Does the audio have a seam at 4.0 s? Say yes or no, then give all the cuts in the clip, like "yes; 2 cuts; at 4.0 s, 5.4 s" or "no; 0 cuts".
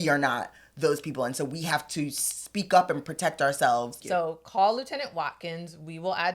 yes; 1 cut; at 4.0 s